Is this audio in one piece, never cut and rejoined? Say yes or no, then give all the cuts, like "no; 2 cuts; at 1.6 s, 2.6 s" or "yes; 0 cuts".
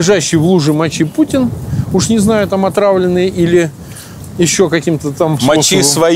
yes; 0 cuts